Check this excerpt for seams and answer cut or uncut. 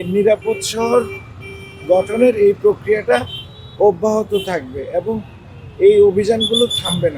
uncut